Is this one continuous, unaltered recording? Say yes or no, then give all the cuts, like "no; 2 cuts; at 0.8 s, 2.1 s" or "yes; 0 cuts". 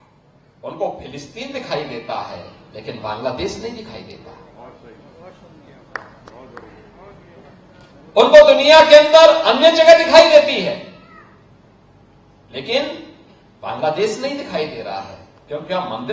yes; 0 cuts